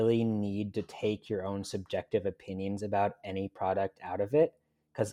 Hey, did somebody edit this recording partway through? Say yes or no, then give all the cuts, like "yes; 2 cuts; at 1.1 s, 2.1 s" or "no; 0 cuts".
no; 0 cuts